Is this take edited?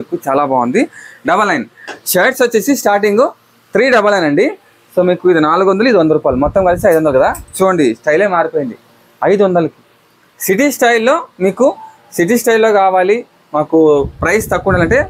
no; 0 cuts

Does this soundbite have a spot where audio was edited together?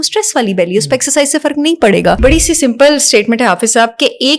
yes; 1 cut; at 2.2 s

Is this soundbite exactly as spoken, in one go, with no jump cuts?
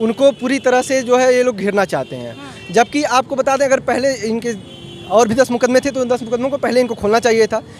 yes; 0 cuts

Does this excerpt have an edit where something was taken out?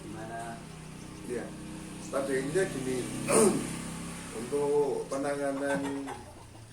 no; 0 cuts

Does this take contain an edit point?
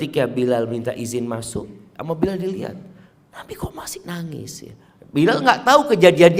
yes; 1 cut; at 1.9 s

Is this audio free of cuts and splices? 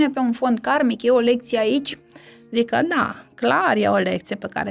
yes; 0 cuts

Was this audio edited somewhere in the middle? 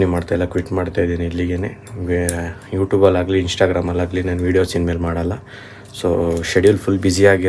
no; 0 cuts

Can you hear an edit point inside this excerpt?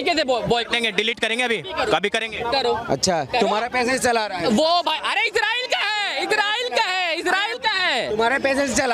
no; 0 cuts

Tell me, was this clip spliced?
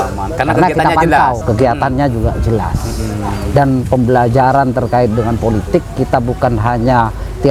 no; 0 cuts

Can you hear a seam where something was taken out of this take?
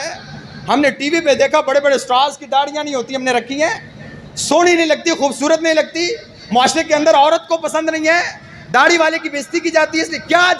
no; 0 cuts

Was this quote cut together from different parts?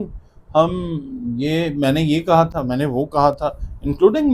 no; 0 cuts

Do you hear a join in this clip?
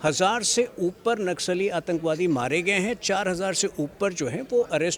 no; 0 cuts

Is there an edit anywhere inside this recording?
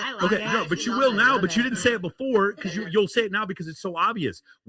no; 0 cuts

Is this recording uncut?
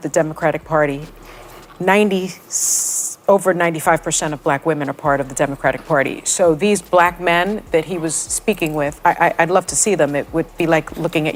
yes; 0 cuts

